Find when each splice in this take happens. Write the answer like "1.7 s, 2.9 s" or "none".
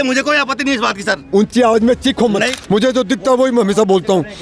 2.5 s